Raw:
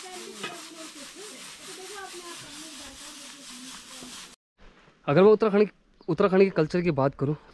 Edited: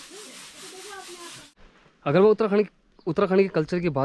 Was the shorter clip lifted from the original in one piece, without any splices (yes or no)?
no